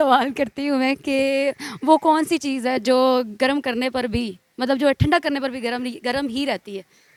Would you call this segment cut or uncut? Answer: uncut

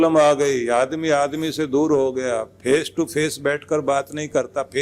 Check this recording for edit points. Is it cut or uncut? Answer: uncut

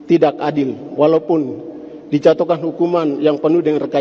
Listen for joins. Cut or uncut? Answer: uncut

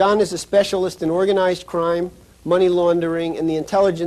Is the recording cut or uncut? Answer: uncut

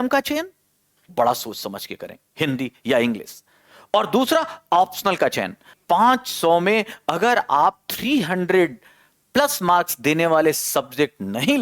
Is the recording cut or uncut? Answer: cut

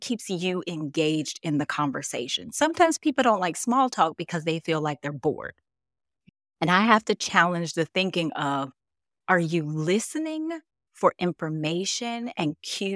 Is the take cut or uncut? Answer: uncut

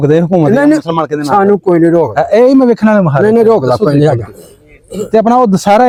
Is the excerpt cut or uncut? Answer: uncut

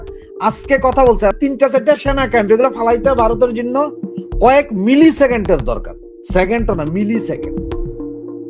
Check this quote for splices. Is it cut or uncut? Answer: cut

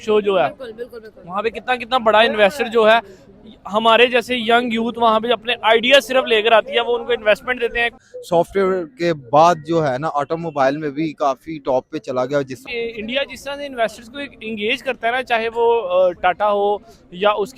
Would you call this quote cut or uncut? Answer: cut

